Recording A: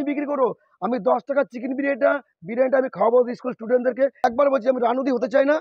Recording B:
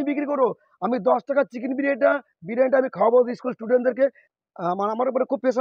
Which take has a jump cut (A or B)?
A